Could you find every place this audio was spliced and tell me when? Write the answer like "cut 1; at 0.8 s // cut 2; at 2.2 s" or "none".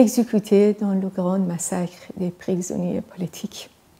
none